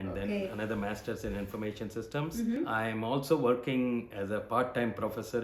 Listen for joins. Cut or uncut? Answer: cut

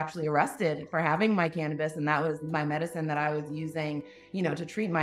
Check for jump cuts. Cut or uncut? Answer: uncut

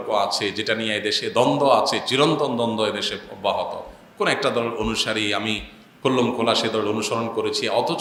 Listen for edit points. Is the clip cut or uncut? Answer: uncut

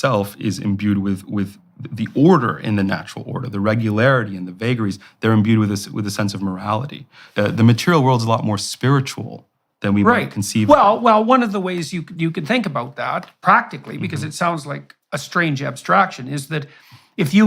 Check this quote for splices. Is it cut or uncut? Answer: cut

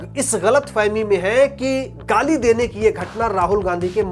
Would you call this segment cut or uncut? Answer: uncut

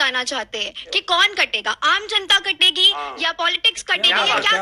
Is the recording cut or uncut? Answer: uncut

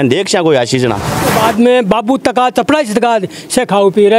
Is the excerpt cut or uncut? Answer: cut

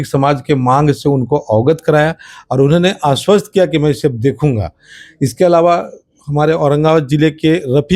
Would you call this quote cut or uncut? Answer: uncut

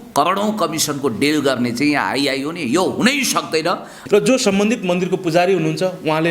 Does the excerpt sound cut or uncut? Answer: cut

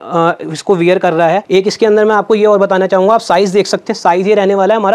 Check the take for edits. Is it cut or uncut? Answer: cut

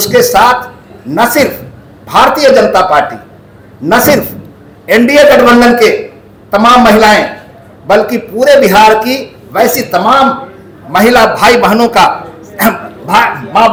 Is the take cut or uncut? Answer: uncut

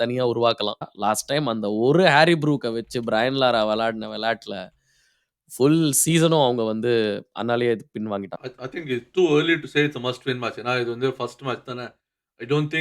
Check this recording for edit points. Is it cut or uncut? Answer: cut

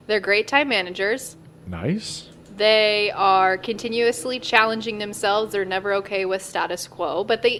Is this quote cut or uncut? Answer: uncut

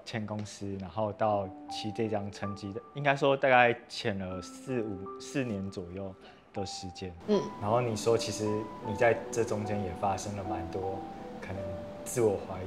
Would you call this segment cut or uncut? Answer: uncut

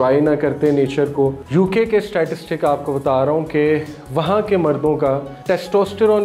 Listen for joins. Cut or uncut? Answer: cut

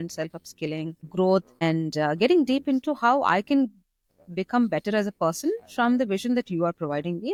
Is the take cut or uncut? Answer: uncut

